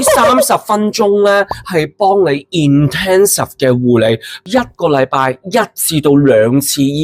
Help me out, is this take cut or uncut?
uncut